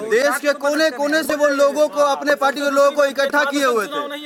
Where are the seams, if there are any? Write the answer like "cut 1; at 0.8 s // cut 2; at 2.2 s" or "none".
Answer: none